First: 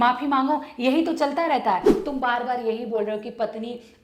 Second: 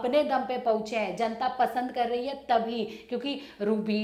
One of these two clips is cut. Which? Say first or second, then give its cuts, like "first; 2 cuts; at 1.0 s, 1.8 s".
first; 1 cut; at 1.9 s